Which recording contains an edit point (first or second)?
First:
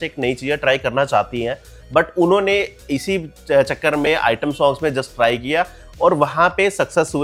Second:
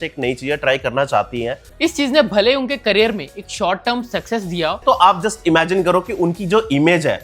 second